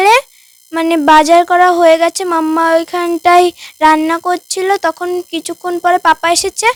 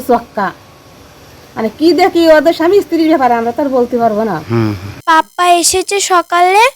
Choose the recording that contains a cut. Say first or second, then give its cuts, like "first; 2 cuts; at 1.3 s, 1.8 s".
second; 1 cut; at 4.9 s